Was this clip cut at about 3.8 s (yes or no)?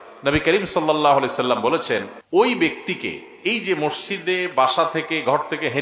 no